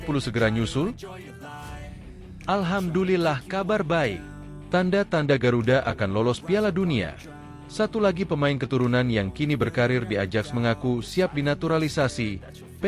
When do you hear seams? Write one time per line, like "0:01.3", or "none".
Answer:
0:01.1
0:02.4